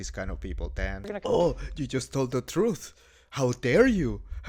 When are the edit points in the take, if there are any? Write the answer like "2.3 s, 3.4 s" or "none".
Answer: 1.0 s